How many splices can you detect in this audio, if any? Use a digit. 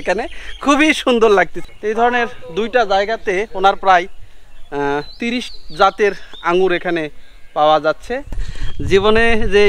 2